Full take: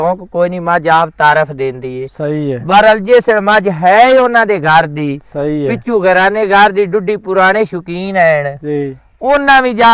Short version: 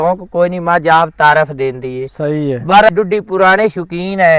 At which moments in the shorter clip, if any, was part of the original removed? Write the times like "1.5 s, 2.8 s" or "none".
2.9 s